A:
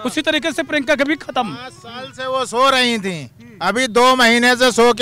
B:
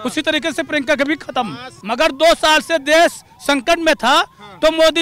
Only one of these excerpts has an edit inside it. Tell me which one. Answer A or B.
B